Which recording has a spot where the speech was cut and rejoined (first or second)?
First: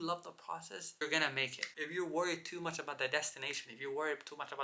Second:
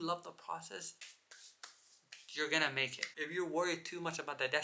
first